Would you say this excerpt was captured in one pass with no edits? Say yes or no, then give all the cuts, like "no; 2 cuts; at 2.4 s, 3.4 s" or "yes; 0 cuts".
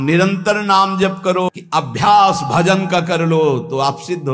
no; 1 cut; at 1.5 s